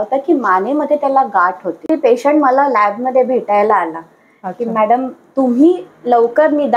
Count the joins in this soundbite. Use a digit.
1